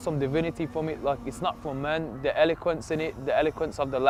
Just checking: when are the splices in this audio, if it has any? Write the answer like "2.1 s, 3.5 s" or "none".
none